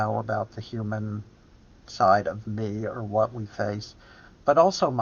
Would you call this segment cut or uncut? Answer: uncut